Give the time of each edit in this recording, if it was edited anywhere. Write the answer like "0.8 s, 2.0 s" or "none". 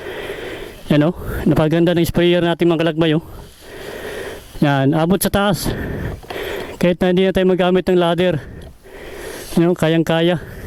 none